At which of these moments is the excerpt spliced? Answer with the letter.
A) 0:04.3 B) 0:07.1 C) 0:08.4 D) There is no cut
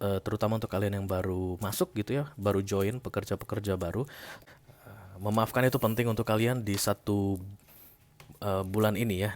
A